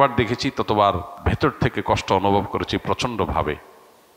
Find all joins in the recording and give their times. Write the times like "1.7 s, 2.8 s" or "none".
1.2 s